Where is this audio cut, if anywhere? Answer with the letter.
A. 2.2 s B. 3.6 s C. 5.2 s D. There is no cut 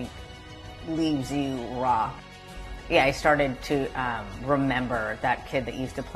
A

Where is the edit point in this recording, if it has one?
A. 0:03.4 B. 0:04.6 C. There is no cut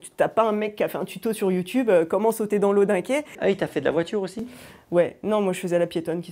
A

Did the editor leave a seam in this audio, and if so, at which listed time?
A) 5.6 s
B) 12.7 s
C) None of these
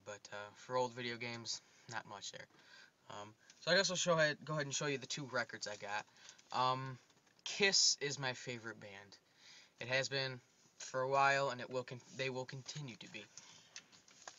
B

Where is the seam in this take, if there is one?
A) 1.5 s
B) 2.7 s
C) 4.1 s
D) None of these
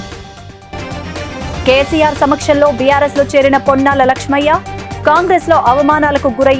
A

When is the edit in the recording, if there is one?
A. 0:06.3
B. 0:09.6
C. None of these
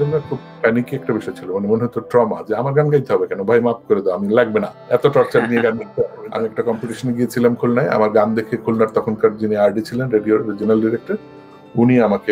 A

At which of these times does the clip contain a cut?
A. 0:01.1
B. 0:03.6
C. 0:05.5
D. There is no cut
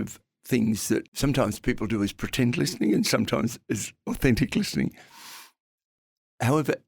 A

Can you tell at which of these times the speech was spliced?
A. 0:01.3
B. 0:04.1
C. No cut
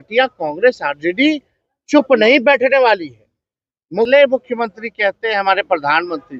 B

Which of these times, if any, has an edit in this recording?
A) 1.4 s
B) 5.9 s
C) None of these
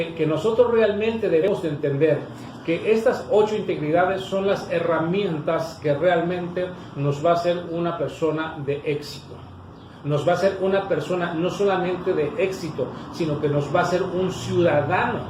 A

